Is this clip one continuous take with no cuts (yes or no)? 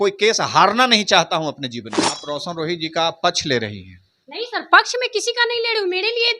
no